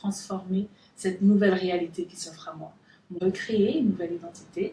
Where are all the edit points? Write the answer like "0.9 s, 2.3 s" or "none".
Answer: 3.2 s